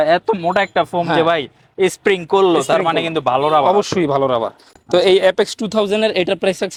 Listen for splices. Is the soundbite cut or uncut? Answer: uncut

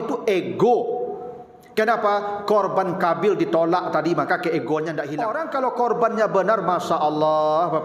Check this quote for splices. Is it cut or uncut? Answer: cut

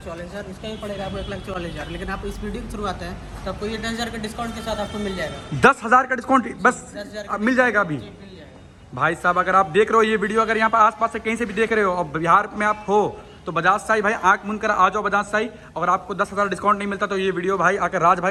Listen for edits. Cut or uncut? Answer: uncut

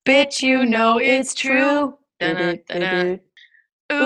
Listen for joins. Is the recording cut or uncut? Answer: cut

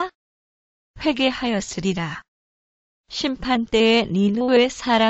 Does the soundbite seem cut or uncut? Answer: uncut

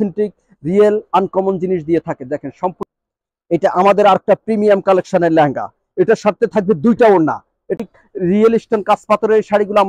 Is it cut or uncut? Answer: cut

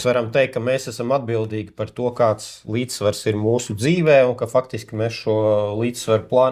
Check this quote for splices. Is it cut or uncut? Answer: uncut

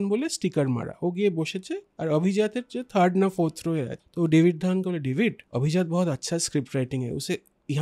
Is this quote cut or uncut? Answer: cut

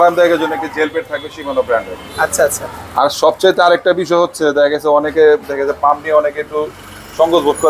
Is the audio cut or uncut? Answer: uncut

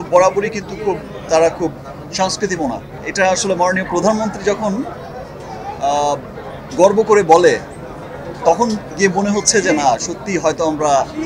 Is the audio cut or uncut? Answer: cut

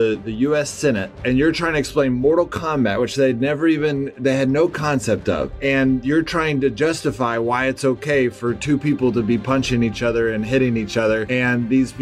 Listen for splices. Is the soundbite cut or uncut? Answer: uncut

